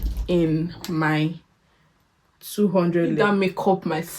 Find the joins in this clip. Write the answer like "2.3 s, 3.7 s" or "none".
3.2 s

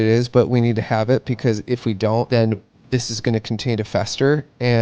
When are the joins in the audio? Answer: 2.3 s

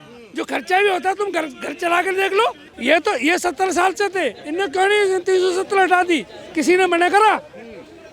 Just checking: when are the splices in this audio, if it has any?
2.7 s

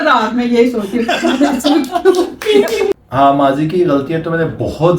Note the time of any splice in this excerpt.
2.9 s

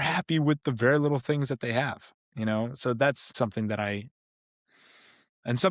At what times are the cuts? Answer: 3.3 s

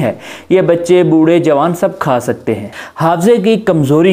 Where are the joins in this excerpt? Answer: 2.7 s

